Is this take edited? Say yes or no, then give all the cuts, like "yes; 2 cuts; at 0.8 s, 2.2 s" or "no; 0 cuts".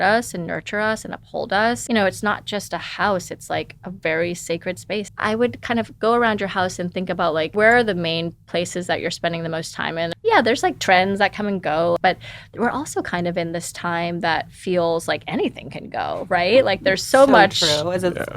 yes; 5 cuts; at 1.8 s, 5.1 s, 7.5 s, 10.1 s, 12.0 s